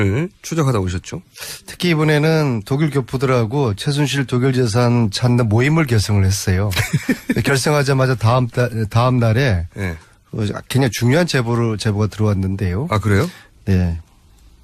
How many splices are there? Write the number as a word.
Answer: zero